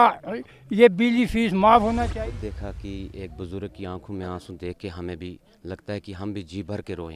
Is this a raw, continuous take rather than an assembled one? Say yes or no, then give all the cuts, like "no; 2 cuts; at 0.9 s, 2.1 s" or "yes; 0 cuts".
no; 1 cut; at 2.1 s